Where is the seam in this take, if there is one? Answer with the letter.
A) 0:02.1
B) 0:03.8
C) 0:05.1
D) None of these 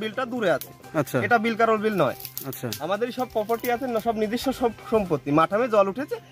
D